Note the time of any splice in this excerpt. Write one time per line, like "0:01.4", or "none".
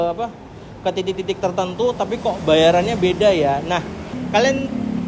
0:04.1